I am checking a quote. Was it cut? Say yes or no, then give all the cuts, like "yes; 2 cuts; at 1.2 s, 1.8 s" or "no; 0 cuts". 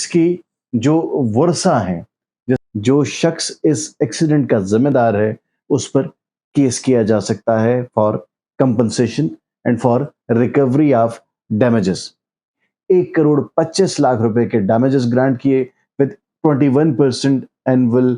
yes; 2 cuts; at 2.6 s, 12.7 s